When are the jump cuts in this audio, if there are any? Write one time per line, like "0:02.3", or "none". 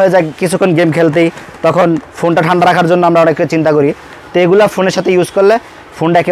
none